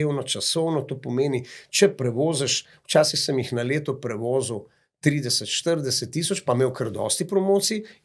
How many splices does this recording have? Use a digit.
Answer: 0